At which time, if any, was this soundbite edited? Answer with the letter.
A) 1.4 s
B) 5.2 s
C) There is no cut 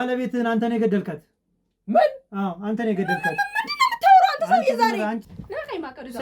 B